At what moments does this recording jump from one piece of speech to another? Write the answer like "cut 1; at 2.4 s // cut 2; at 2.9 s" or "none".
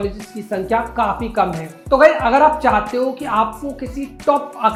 none